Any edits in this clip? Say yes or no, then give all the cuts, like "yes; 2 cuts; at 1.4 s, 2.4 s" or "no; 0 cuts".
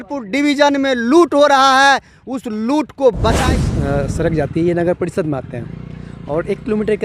yes; 1 cut; at 3.4 s